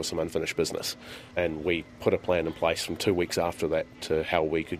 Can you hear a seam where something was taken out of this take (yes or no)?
yes